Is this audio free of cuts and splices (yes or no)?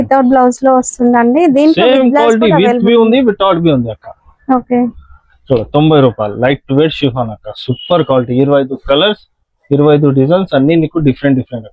yes